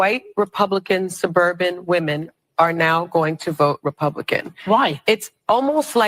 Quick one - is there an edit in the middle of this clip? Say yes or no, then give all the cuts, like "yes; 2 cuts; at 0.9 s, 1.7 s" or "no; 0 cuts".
no; 0 cuts